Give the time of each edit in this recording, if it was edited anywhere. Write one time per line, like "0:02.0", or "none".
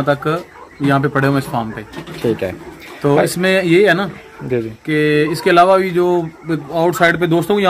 none